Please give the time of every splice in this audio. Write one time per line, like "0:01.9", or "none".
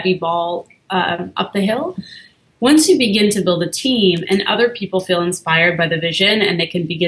none